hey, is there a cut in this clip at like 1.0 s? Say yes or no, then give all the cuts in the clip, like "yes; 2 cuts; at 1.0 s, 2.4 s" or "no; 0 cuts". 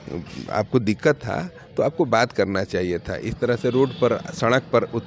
no; 0 cuts